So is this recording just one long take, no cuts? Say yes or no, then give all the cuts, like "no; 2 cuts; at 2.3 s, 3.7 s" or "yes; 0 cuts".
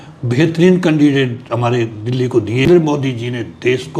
no; 1 cut; at 2.7 s